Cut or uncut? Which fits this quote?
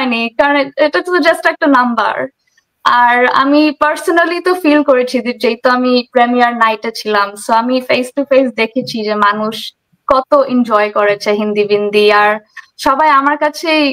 uncut